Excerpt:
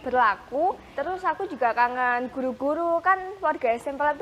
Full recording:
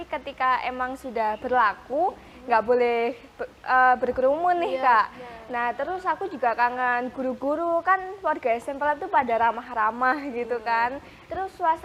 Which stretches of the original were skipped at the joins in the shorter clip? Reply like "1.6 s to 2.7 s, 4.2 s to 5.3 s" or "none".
2.3 s to 5.8 s